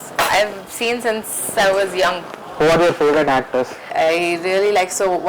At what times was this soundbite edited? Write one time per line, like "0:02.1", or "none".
0:03.8